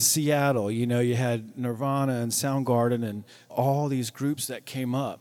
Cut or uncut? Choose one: cut